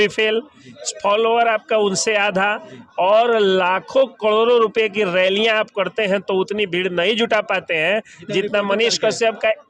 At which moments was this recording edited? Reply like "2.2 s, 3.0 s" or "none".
none